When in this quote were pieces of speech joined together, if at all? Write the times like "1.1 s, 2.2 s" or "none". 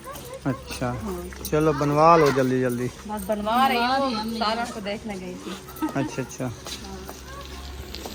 none